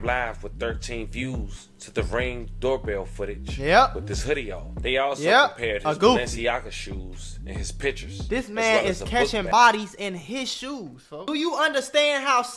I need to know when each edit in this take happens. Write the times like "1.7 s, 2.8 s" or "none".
11.3 s

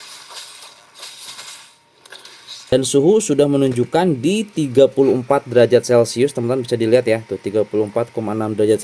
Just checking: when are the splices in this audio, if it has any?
2.7 s

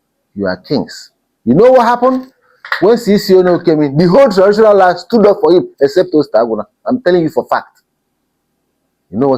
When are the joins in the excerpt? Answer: none

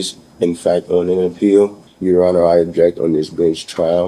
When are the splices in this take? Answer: 1.9 s

